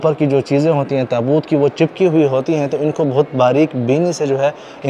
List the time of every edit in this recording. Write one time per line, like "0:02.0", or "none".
none

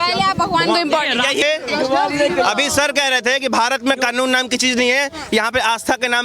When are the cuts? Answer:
0:01.4

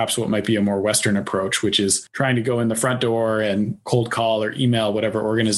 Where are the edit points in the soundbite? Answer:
0:02.0
0:03.8

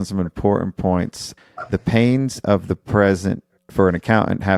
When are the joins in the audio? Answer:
0:01.3

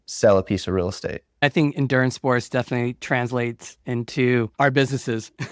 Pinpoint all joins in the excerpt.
0:01.4
0:04.5

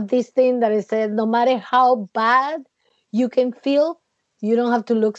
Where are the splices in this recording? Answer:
none

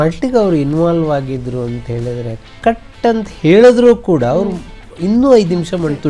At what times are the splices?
none

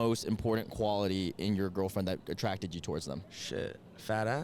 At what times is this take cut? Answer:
0:03.3

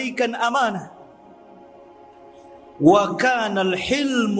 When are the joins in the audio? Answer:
0:00.9
0:02.7

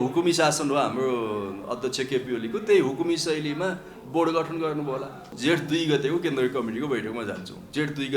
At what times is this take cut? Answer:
0:05.3

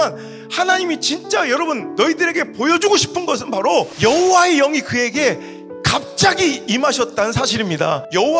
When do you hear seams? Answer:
none

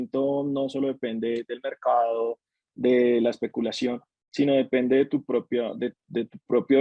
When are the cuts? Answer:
none

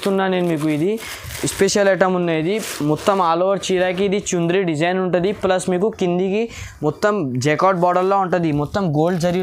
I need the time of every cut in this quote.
none

